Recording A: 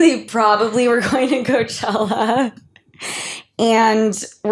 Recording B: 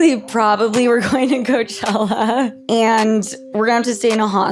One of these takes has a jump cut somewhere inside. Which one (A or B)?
B